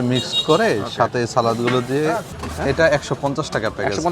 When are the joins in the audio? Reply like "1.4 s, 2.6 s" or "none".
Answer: 2.4 s

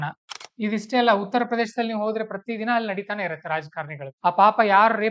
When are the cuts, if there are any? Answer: none

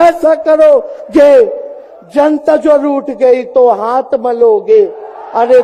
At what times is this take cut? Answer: none

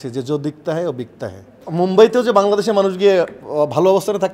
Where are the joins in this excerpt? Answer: 1.6 s

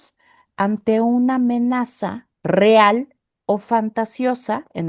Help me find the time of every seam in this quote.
none

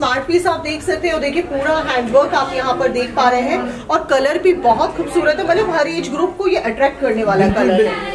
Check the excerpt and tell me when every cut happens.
none

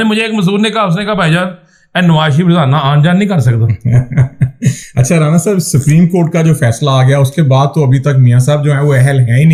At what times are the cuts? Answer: none

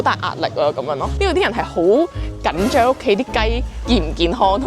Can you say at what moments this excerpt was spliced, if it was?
1.1 s

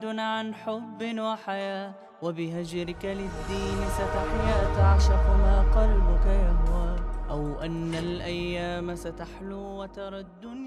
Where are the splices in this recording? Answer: none

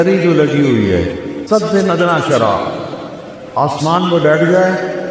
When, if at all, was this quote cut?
1.3 s

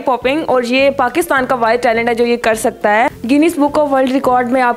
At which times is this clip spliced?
3.1 s

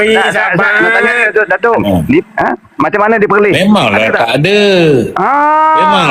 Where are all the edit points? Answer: 2.3 s

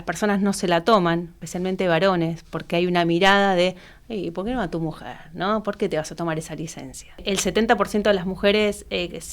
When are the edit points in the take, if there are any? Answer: 1.4 s, 7.2 s

